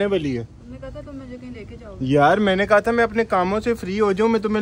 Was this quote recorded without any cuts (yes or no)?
yes